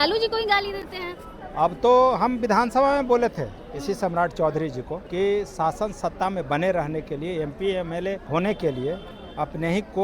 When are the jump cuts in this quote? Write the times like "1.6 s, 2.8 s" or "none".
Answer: 5.0 s, 8.2 s